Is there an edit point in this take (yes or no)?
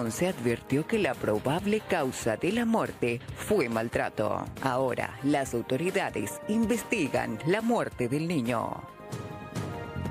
yes